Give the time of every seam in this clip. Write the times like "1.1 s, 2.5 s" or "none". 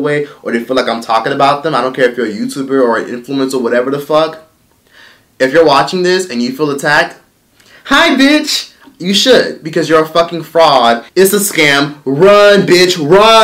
11.1 s